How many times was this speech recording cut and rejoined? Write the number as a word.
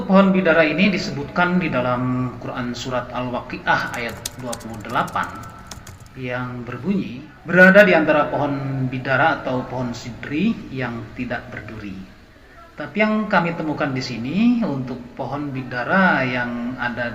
one